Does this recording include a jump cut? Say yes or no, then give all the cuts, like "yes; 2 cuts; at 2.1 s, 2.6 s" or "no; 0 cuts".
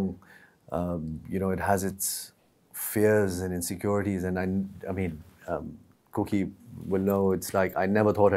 no; 0 cuts